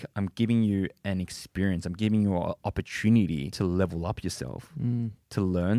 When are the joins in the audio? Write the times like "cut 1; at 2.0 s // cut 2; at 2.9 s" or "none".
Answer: cut 1; at 3.5 s